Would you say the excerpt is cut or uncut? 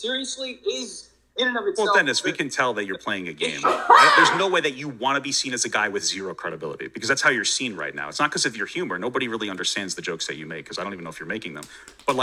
uncut